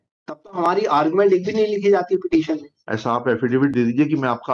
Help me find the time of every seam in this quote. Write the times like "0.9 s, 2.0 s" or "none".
none